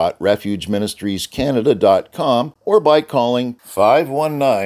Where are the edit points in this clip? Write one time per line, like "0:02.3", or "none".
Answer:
0:02.5